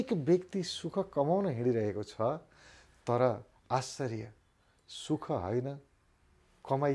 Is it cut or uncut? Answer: uncut